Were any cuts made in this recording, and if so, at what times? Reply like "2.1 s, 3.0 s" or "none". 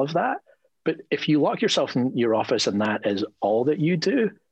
none